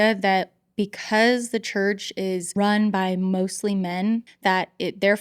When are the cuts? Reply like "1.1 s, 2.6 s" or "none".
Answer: 2.5 s, 4.3 s